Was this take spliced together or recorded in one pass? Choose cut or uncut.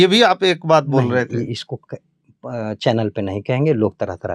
uncut